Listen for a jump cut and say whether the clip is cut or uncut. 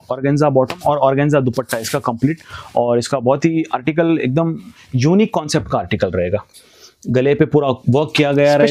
uncut